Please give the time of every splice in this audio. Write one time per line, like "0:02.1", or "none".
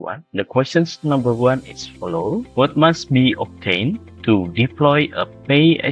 0:02.5